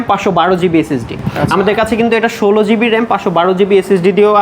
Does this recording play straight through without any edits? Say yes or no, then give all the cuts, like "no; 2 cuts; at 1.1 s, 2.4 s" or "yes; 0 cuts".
yes; 0 cuts